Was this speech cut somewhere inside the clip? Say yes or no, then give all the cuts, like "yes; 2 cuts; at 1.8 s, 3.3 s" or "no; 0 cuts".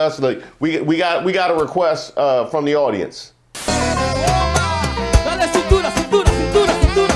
yes; 1 cut; at 3.7 s